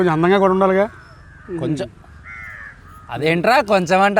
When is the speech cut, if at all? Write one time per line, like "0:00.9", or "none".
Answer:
none

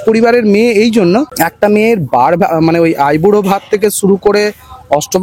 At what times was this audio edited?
0:01.3

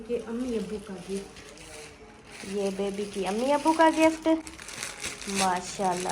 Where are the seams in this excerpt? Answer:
none

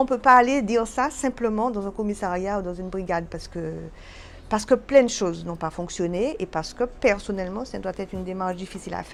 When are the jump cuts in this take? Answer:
none

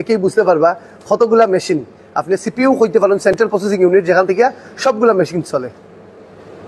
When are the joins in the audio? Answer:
none

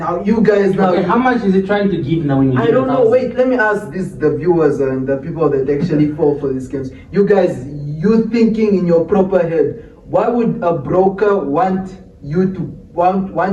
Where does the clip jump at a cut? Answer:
none

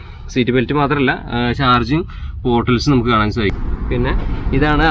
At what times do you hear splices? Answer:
0:03.5

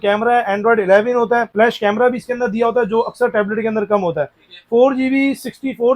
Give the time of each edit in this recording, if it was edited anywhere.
0:01.5

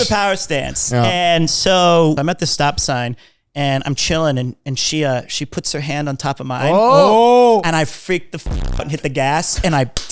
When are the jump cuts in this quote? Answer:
0:02.2
0:07.6

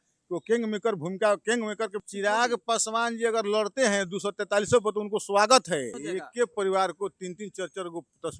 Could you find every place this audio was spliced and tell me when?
0:02.0
0:06.0

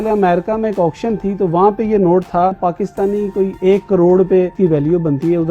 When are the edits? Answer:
0:02.6
0:04.5

